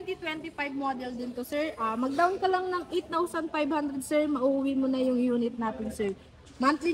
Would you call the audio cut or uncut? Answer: uncut